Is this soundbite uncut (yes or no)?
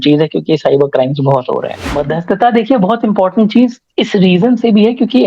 no